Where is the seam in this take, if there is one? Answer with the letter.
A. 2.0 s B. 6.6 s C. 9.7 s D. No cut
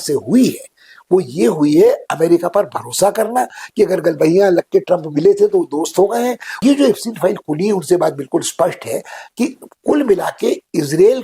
B